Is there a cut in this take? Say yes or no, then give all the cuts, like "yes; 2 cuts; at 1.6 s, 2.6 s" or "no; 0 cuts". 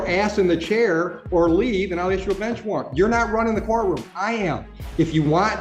no; 0 cuts